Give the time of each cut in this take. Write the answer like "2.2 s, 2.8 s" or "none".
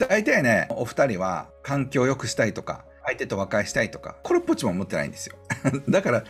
0.7 s, 1.5 s, 3.0 s, 4.1 s